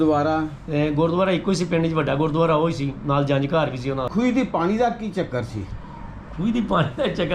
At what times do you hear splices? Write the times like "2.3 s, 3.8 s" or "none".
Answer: 4.1 s